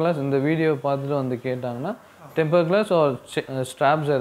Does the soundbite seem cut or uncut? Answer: uncut